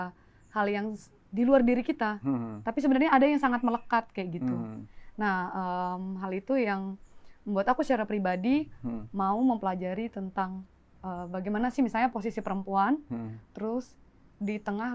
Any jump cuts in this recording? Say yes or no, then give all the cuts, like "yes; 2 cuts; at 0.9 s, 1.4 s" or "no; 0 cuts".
no; 0 cuts